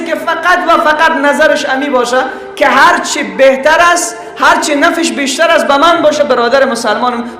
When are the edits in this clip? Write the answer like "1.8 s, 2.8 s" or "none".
none